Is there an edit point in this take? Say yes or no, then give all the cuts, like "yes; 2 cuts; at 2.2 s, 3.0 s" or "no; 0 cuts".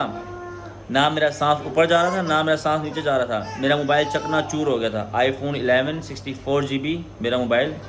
no; 0 cuts